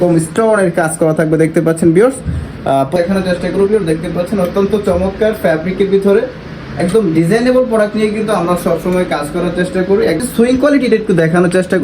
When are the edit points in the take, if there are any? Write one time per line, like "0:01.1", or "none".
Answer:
0:03.0
0:10.2